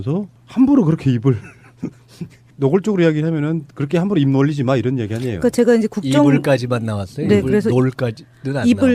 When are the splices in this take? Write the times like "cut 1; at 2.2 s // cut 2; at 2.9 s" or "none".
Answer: cut 1; at 2.7 s